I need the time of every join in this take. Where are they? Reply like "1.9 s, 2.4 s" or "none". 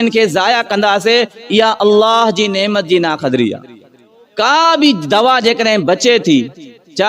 4.5 s